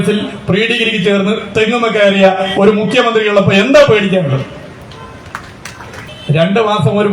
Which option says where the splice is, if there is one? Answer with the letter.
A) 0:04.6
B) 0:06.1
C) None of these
B